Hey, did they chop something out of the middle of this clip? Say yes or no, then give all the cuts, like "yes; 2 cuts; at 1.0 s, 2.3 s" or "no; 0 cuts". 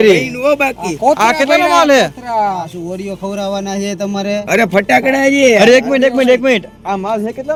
no; 0 cuts